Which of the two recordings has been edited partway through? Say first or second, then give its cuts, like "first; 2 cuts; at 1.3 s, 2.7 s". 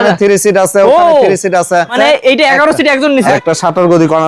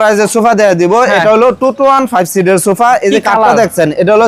first; 2 cuts; at 1.9 s, 3.3 s